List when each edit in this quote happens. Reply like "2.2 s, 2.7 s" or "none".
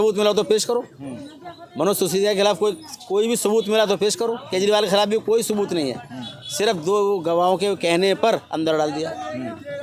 none